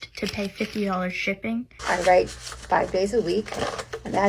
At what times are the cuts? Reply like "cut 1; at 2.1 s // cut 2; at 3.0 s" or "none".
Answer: cut 1; at 1.7 s

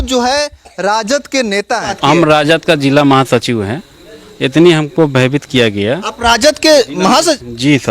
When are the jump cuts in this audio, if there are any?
cut 1; at 1.9 s

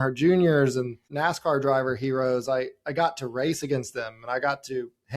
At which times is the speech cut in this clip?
cut 1; at 1.0 s

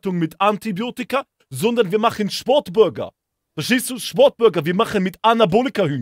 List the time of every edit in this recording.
none

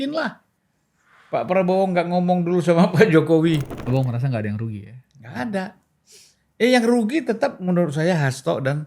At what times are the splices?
cut 1; at 3.7 s

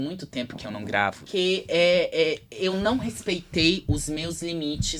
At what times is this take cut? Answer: cut 1; at 1.2 s

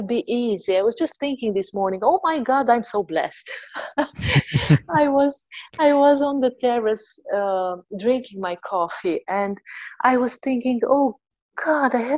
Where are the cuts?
none

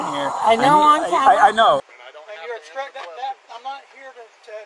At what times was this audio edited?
cut 1; at 1.9 s

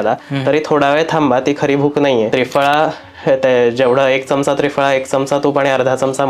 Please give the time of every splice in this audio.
cut 1; at 2.3 s

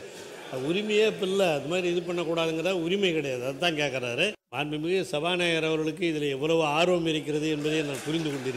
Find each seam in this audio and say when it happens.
cut 1; at 4.4 s

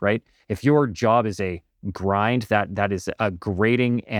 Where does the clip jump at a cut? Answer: none

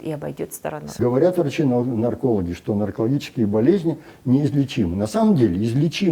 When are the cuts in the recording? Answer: cut 1; at 1.0 s

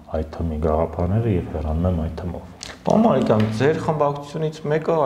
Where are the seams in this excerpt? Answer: none

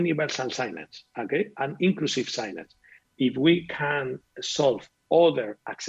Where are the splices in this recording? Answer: cut 1; at 3.0 s

